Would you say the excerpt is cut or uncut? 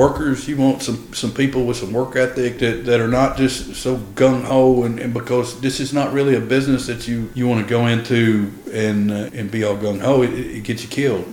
cut